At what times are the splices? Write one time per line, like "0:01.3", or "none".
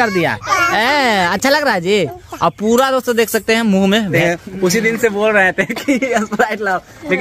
0:04.1